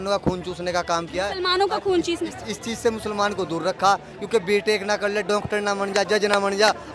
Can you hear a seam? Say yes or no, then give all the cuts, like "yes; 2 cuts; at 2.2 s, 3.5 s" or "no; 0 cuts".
no; 0 cuts